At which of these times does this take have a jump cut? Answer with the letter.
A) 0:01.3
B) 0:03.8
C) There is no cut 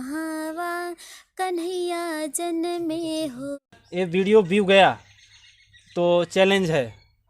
B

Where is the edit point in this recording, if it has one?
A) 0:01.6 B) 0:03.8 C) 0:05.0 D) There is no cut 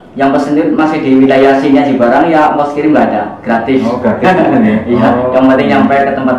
D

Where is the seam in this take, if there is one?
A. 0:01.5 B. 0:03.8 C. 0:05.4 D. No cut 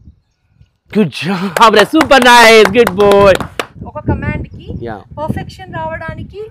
B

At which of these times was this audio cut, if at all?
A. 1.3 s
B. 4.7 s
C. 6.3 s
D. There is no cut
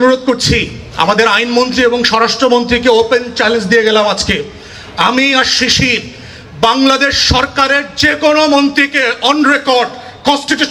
D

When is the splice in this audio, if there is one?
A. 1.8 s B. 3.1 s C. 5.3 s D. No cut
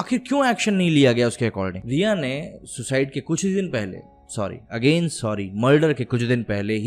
A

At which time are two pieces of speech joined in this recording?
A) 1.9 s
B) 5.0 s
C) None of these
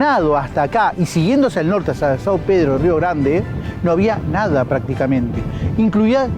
C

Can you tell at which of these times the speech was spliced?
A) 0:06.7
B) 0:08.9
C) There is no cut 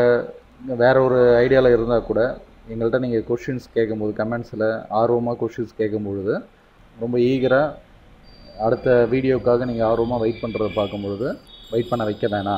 B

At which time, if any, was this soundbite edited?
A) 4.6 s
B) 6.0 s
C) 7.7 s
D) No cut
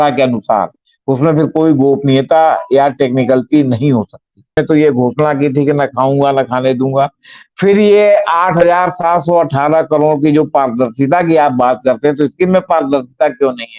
A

